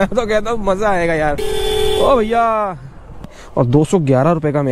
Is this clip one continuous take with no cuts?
no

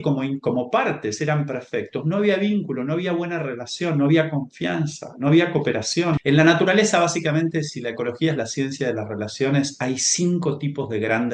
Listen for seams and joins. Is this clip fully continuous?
no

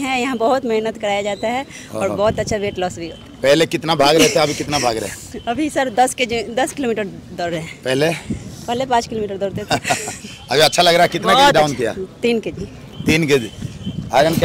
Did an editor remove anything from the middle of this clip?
no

